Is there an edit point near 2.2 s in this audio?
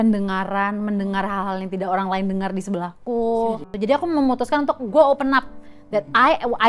no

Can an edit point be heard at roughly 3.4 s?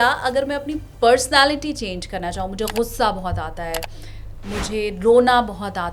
no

